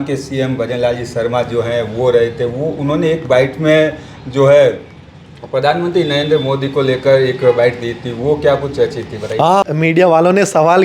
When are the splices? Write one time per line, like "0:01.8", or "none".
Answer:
0:09.6

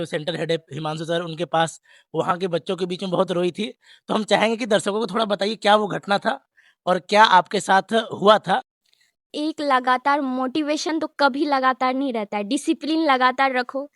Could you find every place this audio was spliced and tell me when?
0:09.2

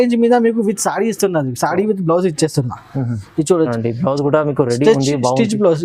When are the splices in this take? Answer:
0:03.7

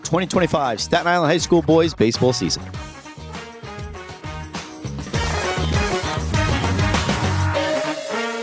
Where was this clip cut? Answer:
0:02.5

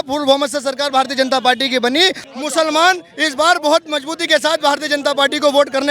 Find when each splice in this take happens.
0:02.2

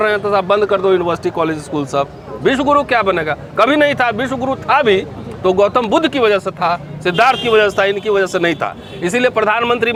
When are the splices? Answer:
none

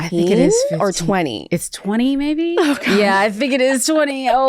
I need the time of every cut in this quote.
0:02.9

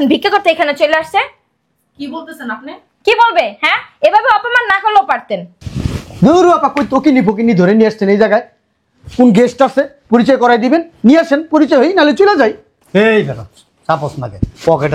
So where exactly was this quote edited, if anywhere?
none

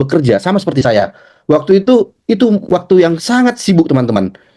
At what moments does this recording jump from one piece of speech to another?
none

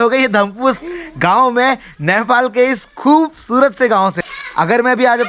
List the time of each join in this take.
none

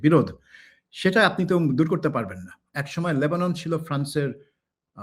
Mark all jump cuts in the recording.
0:02.7

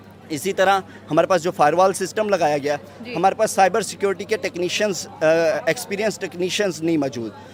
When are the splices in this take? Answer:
none

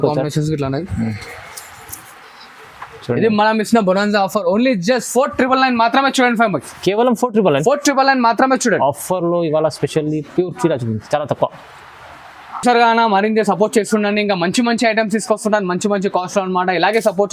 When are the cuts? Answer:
none

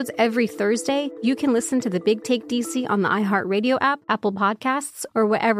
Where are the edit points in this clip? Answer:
0:01.1
0:04.0

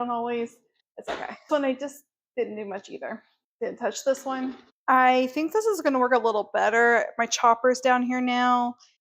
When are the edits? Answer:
none

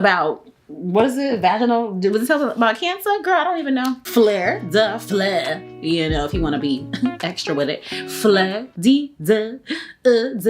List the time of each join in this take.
0:04.0
0:08.6

